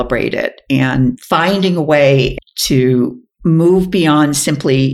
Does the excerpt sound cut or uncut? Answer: cut